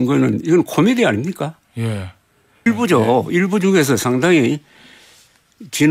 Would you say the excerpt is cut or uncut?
cut